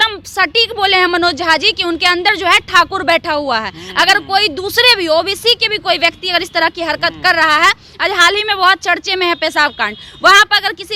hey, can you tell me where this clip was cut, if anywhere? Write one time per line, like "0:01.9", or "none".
none